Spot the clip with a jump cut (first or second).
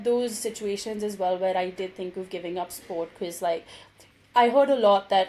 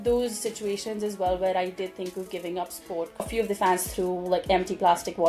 second